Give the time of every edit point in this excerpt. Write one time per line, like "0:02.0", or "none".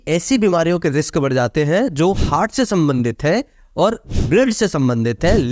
0:04.1